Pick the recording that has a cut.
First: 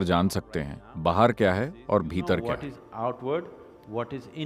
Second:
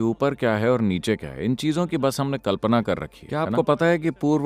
second; 1 cut; at 3.2 s

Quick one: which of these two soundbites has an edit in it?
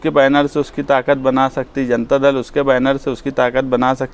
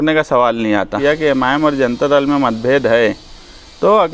second; 1 cut; at 1.0 s

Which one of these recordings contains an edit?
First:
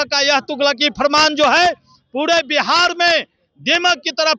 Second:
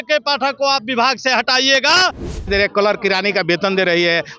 second; 1 cut; at 2.3 s

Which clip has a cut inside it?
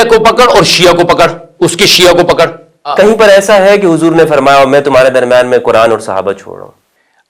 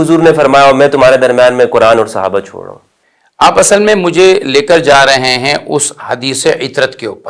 first; 1 cut; at 2.9 s

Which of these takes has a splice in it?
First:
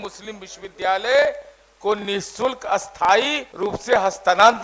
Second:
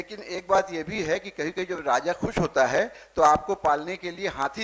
first; 1 cut; at 3.4 s

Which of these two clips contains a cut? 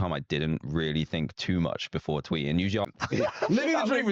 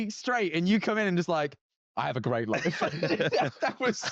first; 1 cut; at 2.8 s

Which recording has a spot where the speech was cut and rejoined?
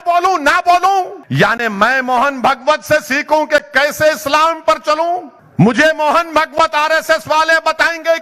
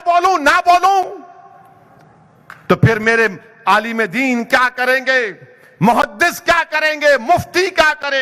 first; 2 cuts; at 1.2 s, 5.4 s

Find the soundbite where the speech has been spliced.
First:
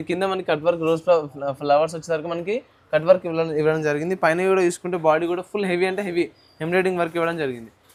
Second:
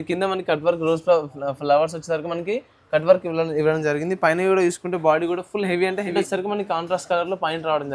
second; 1 cut; at 6.1 s

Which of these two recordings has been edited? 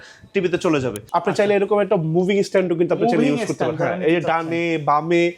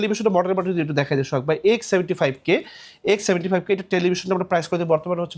first; 1 cut; at 1.0 s

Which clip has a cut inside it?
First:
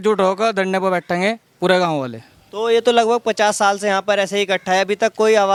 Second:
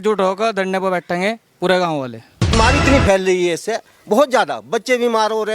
second; 1 cut; at 2.6 s

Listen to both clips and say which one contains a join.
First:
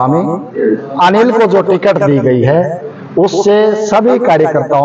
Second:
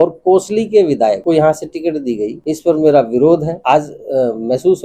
second; 3 cuts; at 1.2 s, 2.4 s, 3.5 s

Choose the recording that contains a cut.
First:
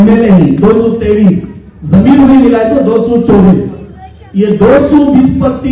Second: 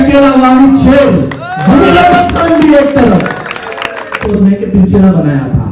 second; 1 cut; at 4.2 s

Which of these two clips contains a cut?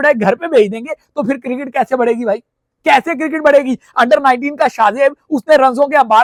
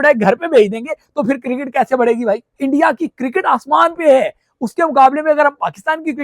second; 1 cut; at 2.5 s

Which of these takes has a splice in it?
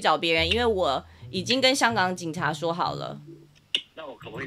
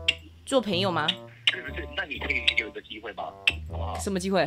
second; 1 cut; at 1.3 s

